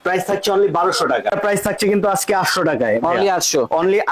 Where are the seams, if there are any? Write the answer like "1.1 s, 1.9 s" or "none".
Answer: 1.3 s